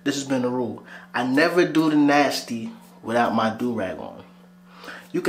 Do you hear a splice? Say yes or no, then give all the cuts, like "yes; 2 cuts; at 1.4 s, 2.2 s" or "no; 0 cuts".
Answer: no; 0 cuts